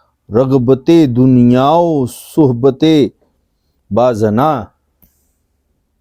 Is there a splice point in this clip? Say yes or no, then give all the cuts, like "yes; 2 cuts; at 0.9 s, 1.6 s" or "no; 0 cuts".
no; 0 cuts